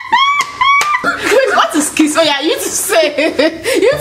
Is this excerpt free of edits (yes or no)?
no